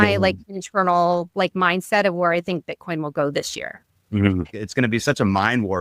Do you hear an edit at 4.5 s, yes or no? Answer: yes